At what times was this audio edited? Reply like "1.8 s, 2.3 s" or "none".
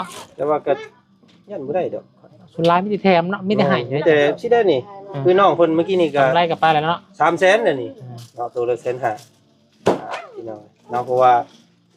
none